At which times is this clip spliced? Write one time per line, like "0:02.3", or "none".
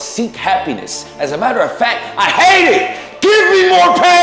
none